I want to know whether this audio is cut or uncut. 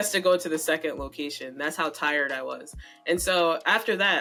uncut